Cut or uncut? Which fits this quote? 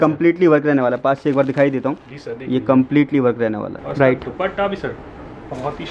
cut